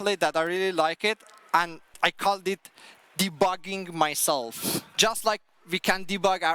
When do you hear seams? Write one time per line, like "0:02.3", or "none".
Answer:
0:01.9
0:04.9